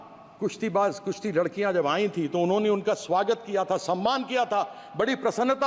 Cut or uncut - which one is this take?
uncut